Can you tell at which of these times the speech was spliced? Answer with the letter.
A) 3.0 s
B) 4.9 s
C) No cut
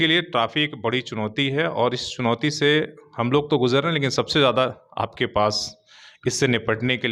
C